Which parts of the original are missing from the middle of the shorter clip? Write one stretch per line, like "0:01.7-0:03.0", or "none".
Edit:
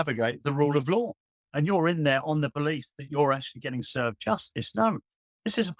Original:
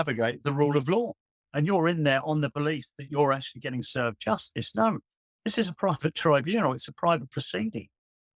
none